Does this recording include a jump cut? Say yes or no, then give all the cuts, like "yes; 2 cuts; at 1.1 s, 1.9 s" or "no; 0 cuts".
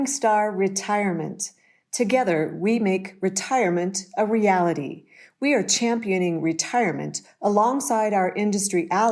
no; 0 cuts